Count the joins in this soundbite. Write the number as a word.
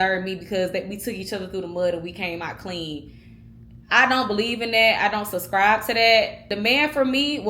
one